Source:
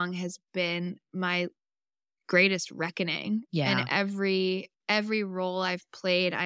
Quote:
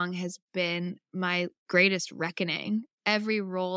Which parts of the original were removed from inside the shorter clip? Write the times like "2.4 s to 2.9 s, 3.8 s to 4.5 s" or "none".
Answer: 1.6 s to 2.2 s, 3.5 s to 4.7 s